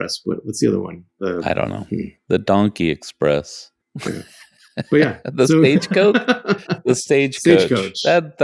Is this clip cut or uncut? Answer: uncut